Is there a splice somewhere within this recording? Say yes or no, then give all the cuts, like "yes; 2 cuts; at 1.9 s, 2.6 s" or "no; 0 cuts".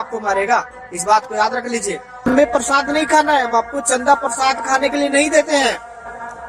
yes; 1 cut; at 2.2 s